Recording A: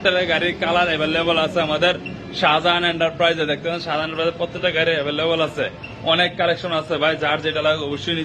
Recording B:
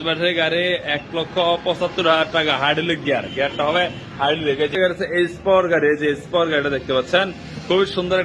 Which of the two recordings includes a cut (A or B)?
B